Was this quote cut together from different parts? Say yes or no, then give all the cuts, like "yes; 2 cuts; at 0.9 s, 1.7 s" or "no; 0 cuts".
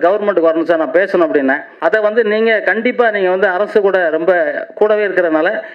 yes; 1 cut; at 1.7 s